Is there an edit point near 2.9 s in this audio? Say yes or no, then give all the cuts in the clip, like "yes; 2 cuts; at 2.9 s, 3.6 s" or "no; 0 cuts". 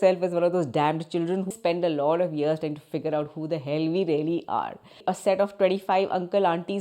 no; 2 cuts; at 1.5 s, 5.1 s